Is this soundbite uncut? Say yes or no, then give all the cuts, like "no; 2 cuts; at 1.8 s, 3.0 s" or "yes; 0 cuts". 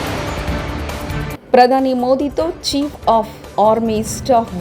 no; 1 cut; at 1.1 s